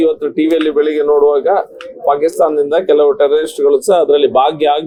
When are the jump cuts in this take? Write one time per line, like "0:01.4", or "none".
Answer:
none